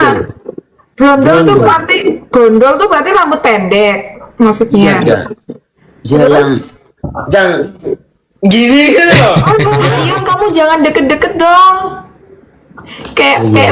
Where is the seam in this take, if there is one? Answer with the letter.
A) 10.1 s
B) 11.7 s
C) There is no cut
A